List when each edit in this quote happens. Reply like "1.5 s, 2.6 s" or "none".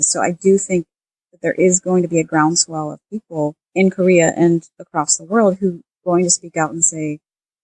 3.6 s, 5.9 s